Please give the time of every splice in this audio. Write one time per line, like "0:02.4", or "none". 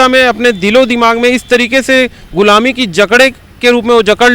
none